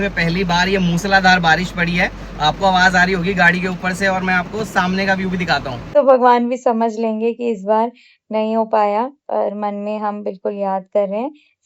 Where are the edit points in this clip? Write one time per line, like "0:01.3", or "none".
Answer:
0:05.9